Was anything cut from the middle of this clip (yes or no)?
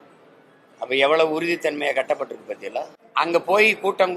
yes